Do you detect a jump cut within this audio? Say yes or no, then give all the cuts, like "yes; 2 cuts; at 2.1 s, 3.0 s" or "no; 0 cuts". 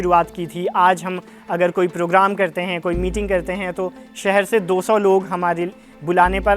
no; 0 cuts